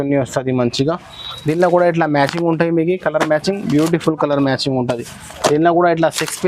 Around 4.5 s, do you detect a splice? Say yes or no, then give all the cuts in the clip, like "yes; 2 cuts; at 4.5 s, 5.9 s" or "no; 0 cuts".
no; 0 cuts